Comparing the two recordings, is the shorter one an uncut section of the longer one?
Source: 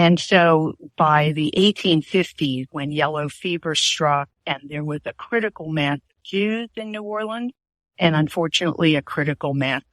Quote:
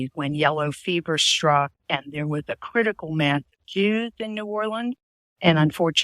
yes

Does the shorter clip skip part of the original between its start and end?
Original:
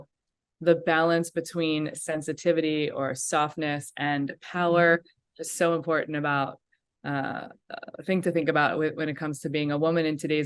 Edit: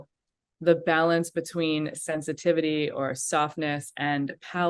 no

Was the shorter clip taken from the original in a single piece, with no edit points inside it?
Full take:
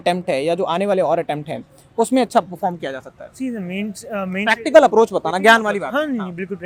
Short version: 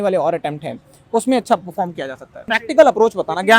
no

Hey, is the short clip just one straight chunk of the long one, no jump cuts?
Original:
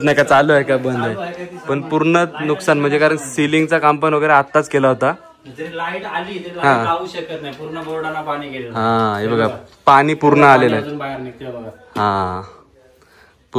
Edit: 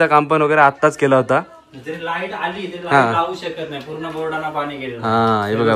yes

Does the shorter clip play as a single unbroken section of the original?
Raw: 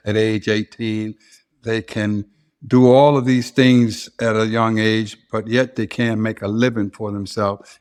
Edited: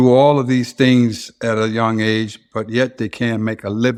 yes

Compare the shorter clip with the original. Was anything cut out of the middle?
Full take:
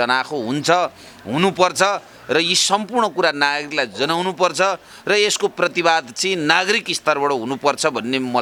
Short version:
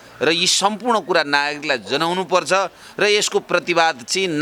no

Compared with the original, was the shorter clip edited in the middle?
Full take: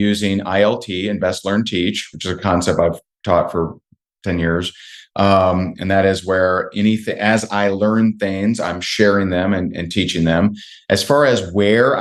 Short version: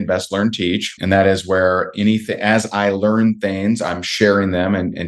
yes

